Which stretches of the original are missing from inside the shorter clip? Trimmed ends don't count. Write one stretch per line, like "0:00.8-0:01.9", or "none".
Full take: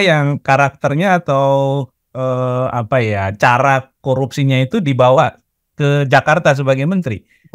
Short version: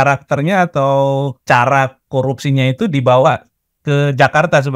0:01.9-0:03.3